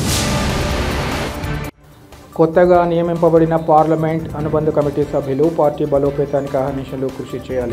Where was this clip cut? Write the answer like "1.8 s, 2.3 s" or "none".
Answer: 1.1 s